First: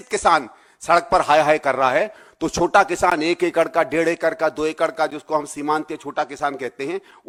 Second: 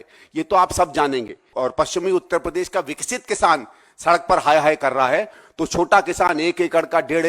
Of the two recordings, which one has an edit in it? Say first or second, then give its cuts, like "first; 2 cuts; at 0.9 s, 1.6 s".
second; 1 cut; at 1.5 s